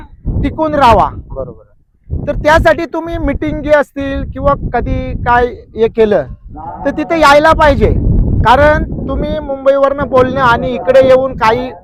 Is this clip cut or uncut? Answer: uncut